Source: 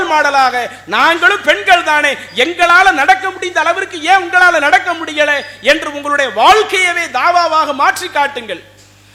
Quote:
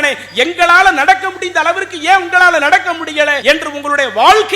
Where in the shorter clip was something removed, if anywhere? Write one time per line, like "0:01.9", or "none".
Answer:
0:03.4

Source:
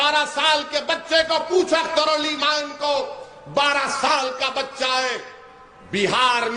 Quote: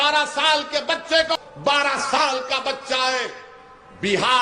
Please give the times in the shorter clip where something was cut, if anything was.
0:01.4

